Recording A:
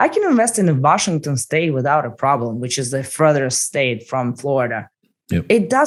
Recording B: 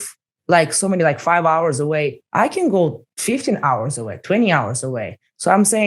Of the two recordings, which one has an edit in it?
B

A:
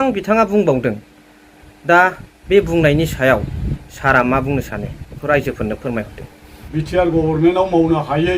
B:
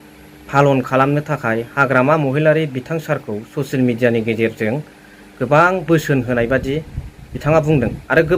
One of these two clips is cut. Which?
A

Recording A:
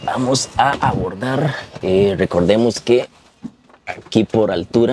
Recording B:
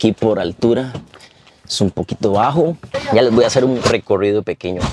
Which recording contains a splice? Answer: B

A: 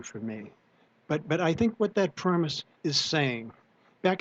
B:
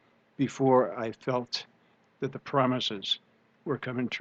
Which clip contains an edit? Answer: A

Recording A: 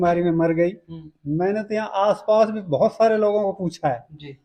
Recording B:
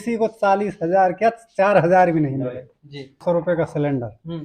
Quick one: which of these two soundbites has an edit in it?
B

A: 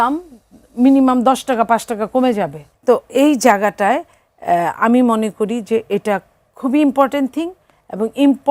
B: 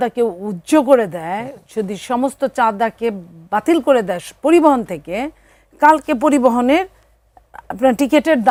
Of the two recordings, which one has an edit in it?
A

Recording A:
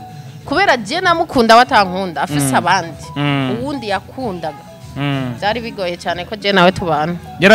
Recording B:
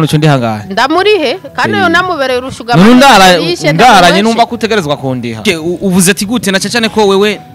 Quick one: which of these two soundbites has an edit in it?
B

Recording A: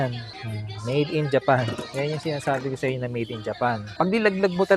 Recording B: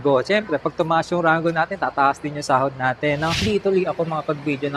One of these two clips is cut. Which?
B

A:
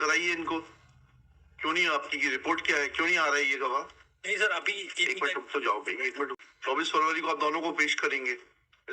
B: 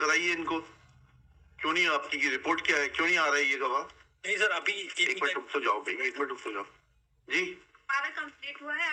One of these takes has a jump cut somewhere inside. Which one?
A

